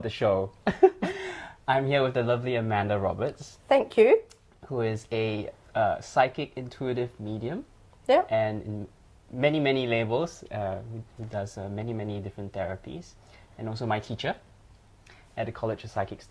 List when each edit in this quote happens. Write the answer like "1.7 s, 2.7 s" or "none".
15.4 s